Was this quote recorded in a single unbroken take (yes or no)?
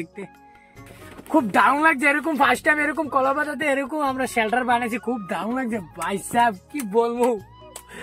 no